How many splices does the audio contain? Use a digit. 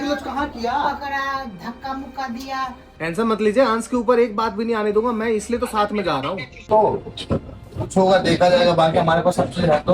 2